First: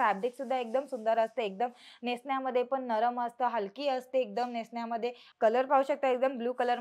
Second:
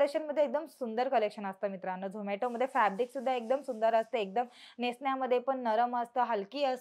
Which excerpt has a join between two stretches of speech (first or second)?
first